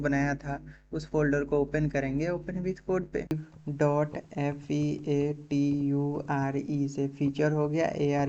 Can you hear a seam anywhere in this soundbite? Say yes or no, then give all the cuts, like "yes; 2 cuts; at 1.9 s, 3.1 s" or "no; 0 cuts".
yes; 1 cut; at 3.2 s